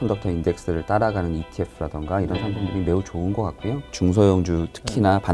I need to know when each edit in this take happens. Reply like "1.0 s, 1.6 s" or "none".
3.9 s

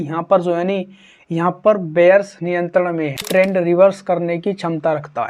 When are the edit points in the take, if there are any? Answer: 3.3 s

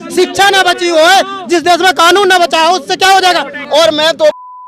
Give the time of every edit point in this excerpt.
3.5 s

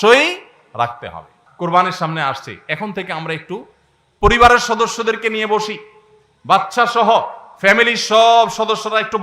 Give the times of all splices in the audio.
1.4 s

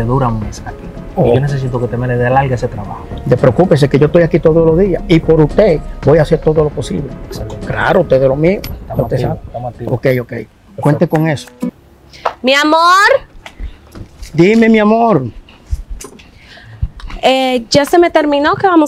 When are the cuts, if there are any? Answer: 11.7 s

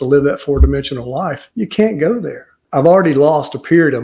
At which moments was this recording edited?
1.4 s, 2.6 s

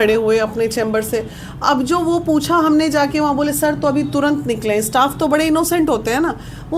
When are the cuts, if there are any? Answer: none

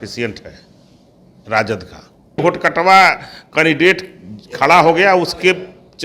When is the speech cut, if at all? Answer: 2.4 s

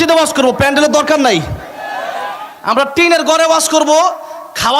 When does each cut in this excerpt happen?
none

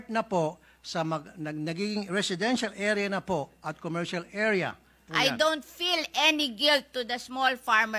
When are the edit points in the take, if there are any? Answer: 5.0 s

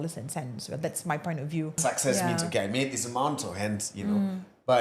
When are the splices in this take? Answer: 1.8 s

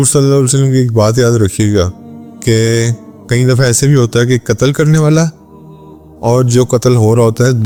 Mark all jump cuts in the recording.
none

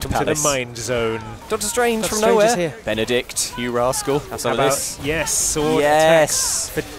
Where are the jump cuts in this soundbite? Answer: 1.5 s, 2.8 s, 4.3 s

